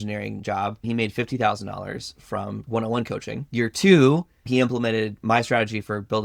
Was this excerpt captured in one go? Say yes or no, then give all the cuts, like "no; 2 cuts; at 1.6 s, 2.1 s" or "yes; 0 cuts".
no; 4 cuts; at 0.8 s, 2.6 s, 3.4 s, 4.5 s